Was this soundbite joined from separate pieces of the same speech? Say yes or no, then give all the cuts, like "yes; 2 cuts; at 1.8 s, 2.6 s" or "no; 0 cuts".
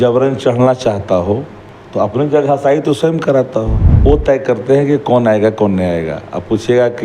yes; 1 cut; at 3.9 s